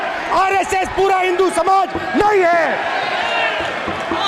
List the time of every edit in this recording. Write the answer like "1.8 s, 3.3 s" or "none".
none